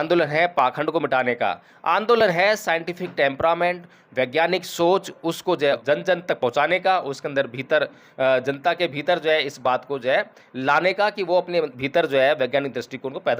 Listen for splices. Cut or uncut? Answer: cut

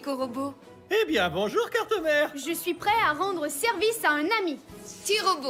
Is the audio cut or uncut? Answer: uncut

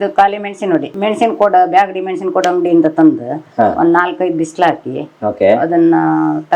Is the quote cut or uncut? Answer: cut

